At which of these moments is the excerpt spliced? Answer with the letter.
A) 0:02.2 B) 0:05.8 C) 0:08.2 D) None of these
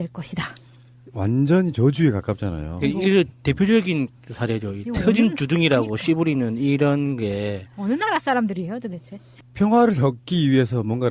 A